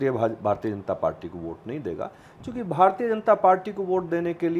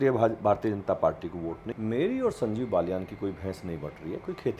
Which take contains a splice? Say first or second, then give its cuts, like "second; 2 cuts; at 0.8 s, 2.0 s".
second; 1 cut; at 1.6 s